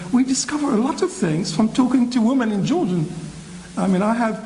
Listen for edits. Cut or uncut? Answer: uncut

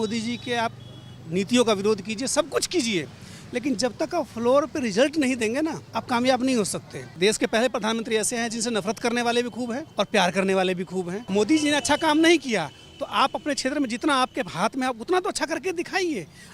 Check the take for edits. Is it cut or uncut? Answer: cut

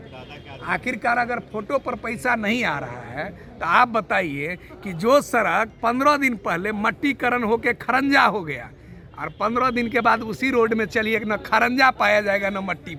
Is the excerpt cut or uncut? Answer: uncut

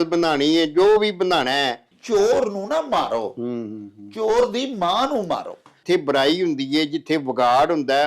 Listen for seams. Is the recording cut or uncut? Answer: cut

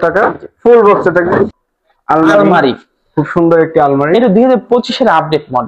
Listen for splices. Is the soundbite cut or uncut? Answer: cut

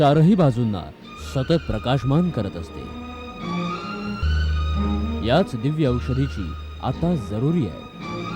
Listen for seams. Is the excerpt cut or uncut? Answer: cut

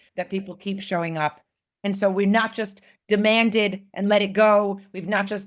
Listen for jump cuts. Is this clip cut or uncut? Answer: uncut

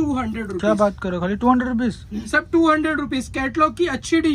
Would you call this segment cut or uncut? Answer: uncut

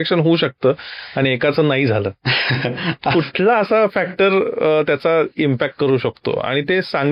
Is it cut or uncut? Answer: uncut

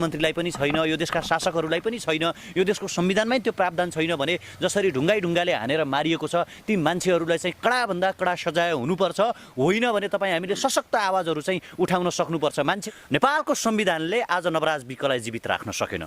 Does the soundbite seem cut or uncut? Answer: cut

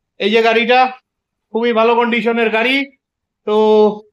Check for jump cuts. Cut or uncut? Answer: uncut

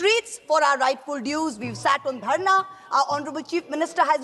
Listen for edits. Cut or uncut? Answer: uncut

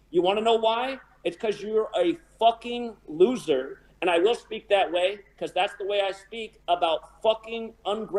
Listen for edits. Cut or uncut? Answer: uncut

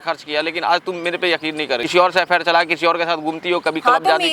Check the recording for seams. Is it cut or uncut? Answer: cut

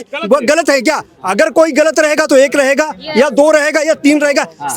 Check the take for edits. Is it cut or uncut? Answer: uncut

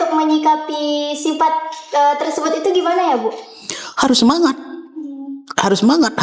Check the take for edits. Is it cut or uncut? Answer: uncut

